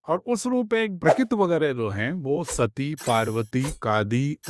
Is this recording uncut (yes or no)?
no